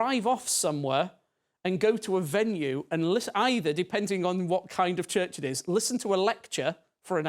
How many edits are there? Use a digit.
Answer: 0